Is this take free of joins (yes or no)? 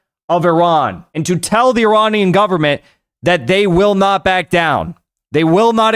no